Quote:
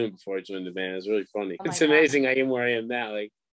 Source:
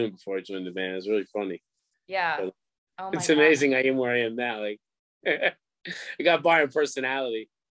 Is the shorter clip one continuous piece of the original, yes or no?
no